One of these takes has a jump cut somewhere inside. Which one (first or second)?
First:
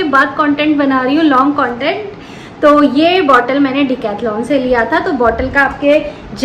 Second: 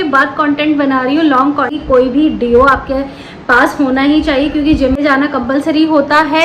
second